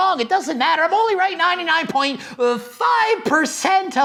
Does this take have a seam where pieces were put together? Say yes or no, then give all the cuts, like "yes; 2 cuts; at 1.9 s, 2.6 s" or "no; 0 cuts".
no; 0 cuts